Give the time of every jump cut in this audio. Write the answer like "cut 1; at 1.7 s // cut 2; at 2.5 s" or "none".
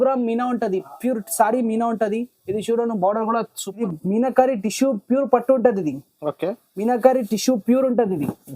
cut 1; at 3.6 s